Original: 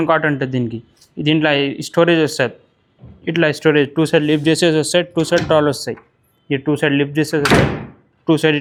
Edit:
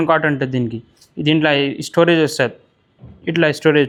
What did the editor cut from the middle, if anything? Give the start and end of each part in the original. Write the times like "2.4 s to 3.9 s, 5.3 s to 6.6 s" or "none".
none